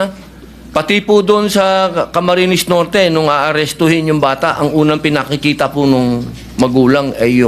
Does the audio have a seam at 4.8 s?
no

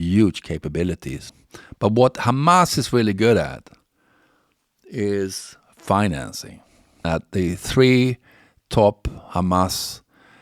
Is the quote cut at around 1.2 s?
yes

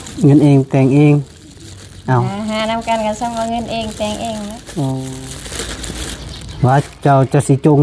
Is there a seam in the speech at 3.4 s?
no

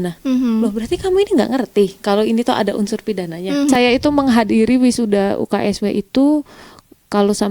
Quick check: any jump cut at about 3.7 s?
yes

